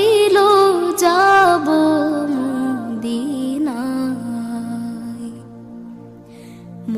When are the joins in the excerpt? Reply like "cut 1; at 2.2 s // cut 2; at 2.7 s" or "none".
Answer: cut 1; at 0.9 s